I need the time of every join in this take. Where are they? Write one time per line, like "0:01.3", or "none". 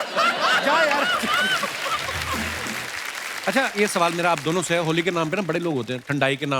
0:02.6

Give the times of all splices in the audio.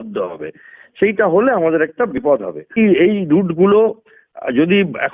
0:02.8

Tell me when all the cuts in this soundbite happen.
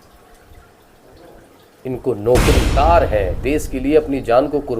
0:02.7

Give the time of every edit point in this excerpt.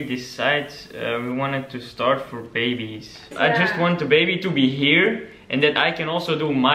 0:03.2

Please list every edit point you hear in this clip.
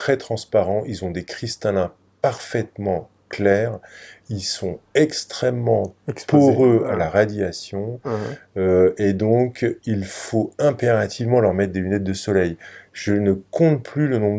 none

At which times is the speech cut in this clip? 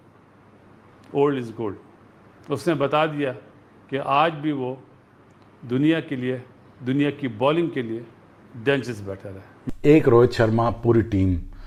none

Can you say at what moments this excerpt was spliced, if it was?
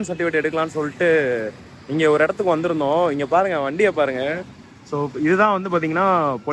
none

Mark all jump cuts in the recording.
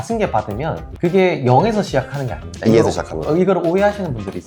none

